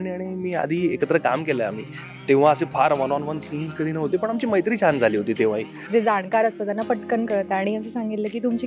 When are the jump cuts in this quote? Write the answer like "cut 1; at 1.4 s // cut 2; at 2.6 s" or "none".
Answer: cut 1; at 5.7 s